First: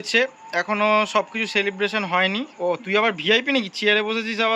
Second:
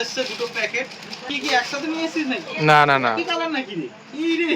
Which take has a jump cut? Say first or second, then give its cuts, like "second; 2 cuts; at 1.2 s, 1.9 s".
second; 1 cut; at 1.3 s